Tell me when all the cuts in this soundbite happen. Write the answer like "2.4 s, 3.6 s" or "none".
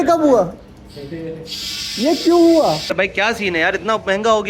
2.6 s